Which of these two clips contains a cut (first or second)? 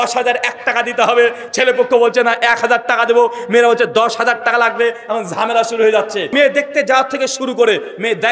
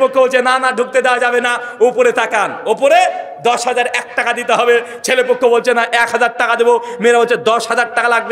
first